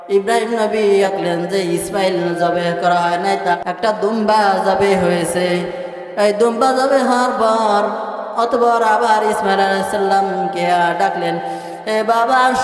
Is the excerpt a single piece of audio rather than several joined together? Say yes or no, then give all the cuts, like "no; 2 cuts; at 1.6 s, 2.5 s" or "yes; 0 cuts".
no; 2 cuts; at 1.1 s, 2.3 s